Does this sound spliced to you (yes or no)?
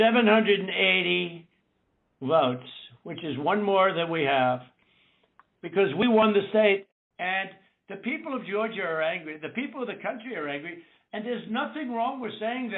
yes